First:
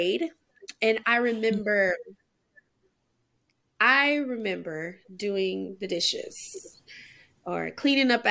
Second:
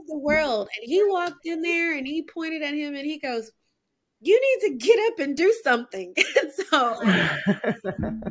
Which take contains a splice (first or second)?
second